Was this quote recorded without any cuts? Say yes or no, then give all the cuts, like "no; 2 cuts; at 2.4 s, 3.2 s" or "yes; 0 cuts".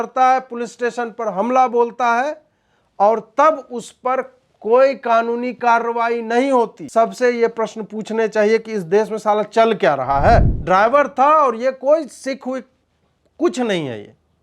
no; 2 cuts; at 6.8 s, 10.5 s